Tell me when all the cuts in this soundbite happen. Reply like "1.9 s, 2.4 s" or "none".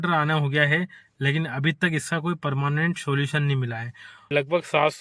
4.1 s

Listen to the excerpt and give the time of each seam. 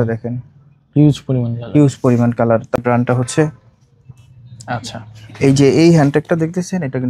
2.8 s

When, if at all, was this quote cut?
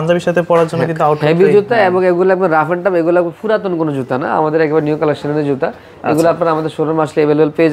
none

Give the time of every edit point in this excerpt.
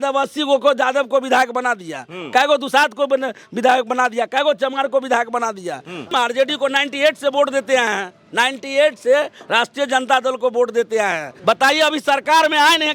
6.1 s, 11.3 s

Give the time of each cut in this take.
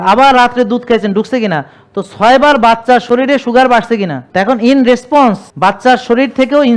4.2 s, 5.5 s

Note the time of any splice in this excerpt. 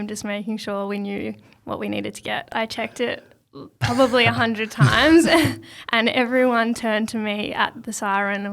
2.5 s

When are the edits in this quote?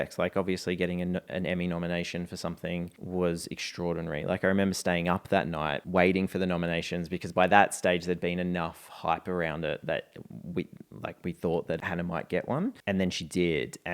3.0 s, 5.8 s, 11.8 s, 12.8 s

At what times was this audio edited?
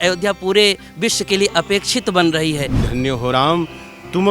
2.9 s

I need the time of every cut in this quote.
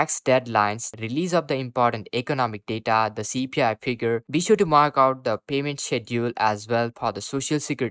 0.9 s

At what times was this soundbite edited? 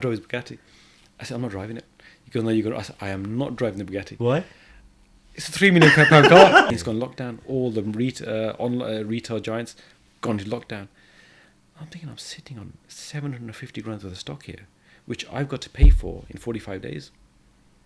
6.7 s

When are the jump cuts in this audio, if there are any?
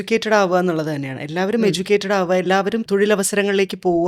2.8 s

